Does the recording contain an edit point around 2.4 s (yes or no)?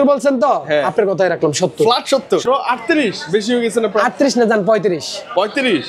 yes